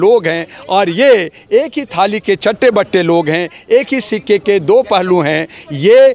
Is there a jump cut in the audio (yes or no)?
no